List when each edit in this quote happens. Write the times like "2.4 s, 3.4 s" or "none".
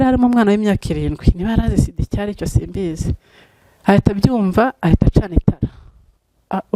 none